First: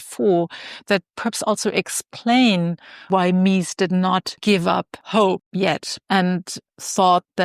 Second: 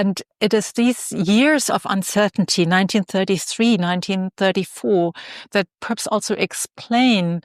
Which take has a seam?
first; 1 cut; at 5.5 s

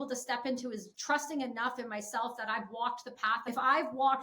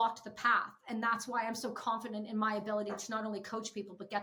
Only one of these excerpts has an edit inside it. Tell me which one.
first; 2 cuts; at 0.9 s, 3.4 s

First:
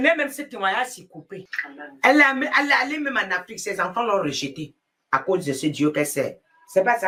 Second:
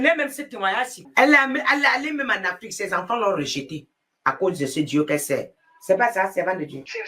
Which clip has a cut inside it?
second; 1 cut; at 1.0 s

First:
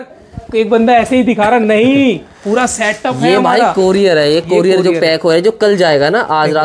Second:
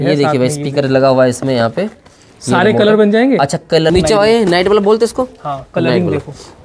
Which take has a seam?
second; 1 cut; at 3.9 s

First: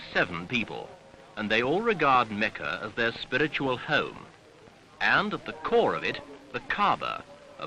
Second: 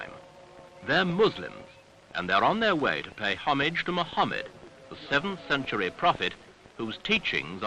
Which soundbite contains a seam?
first; 1 cut; at 5.0 s

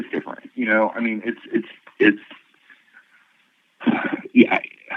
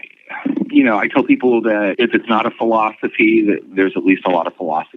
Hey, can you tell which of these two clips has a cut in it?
second; 1 cut; at 1.9 s

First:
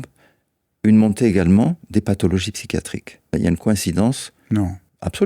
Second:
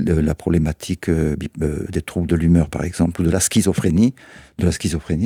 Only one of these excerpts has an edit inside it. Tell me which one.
first; 1 cut; at 3.3 s

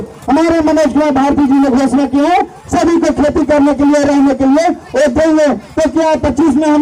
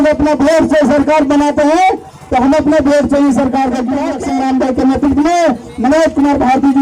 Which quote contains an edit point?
second; 1 cut; at 4.1 s

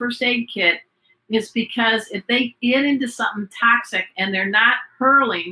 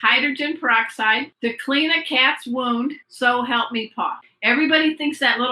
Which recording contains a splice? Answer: second; 3 cuts; at 1.3 s, 3.1 s, 4.3 s

